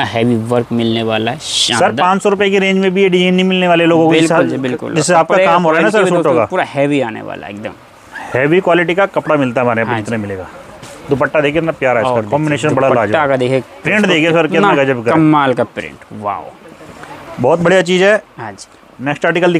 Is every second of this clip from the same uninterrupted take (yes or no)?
yes